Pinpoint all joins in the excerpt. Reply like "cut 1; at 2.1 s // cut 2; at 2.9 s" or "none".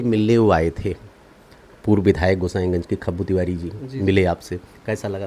none